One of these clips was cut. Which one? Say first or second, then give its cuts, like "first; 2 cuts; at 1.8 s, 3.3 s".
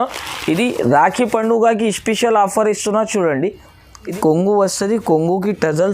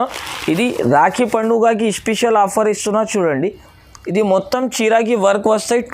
first; 1 cut; at 4.1 s